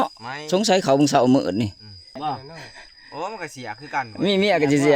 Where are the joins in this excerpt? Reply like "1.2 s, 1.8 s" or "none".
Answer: 2.2 s